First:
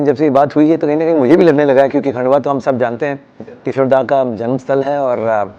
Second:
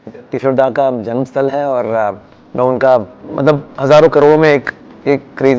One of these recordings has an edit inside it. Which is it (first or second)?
second